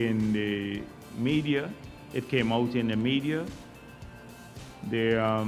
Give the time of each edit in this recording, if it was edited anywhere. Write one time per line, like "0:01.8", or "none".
none